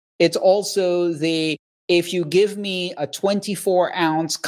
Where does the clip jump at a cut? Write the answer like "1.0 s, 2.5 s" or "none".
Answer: none